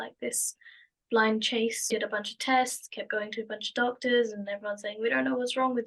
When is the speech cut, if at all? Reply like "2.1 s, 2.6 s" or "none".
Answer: 1.9 s